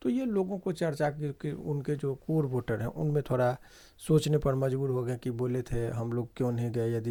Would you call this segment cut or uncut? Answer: uncut